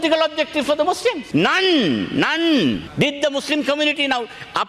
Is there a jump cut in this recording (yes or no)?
yes